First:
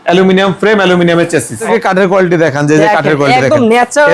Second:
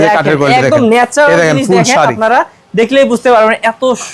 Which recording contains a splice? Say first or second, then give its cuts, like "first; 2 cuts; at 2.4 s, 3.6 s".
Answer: first; 1 cut; at 1.7 s